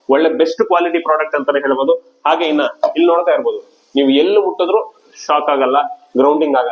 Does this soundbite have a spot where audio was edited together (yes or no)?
no